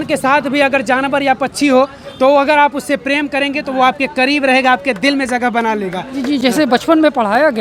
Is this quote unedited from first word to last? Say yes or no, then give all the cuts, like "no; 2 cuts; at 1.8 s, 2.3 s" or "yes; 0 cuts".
yes; 0 cuts